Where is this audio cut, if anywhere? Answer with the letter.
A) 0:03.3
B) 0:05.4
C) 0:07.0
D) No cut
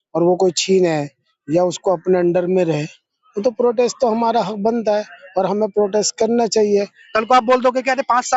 C